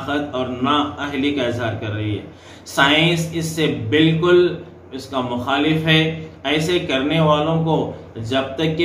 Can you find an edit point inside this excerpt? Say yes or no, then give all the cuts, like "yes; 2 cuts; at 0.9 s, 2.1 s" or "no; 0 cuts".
no; 0 cuts